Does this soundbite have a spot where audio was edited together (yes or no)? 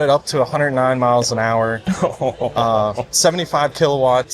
no